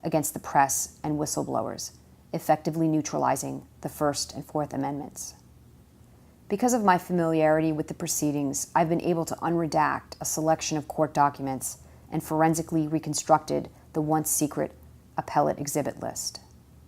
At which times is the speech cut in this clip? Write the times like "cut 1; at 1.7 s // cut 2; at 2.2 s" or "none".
cut 1; at 5.5 s